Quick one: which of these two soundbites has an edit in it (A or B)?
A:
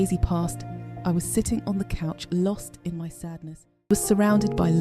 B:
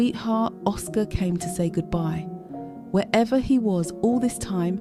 A